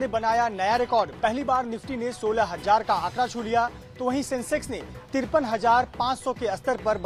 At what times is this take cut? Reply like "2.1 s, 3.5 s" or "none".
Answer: none

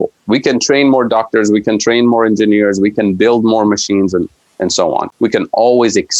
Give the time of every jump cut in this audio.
5.1 s

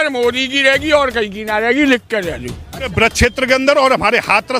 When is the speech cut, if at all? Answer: 2.9 s

